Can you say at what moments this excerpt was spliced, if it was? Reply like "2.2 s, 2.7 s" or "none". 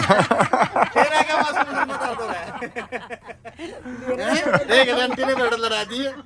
none